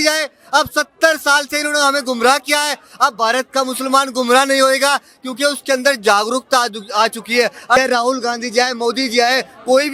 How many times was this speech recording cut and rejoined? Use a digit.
1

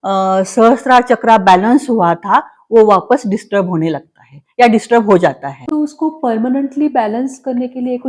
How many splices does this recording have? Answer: 1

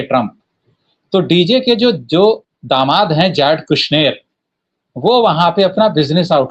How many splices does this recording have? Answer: 0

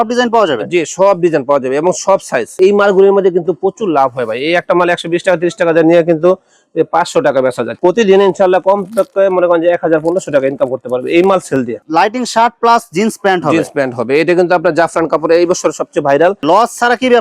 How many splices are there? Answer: 4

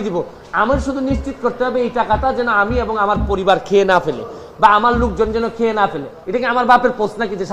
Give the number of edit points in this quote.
1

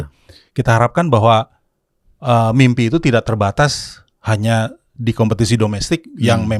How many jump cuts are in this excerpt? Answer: 0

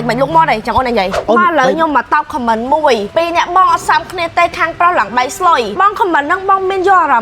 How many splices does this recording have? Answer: 3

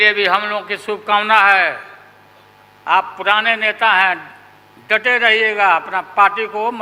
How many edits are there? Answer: 0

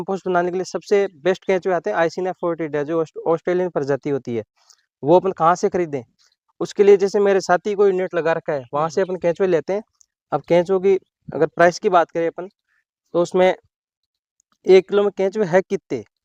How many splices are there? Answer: 0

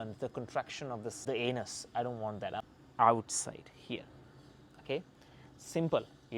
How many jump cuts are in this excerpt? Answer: 2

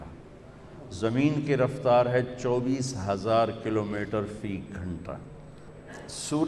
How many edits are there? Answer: 1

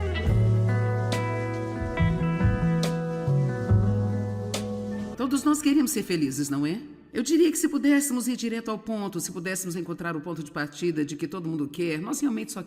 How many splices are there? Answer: 1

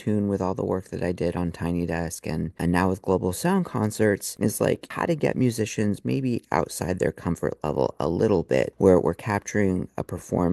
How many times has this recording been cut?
3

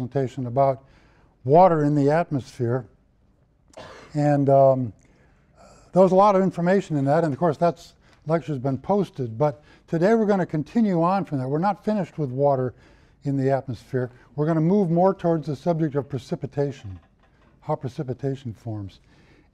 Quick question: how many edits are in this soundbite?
1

